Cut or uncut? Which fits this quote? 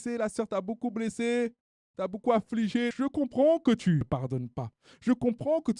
cut